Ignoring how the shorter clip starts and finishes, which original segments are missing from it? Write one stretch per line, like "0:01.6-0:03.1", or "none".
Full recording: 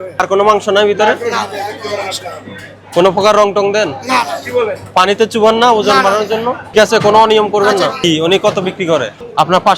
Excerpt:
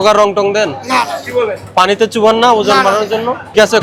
none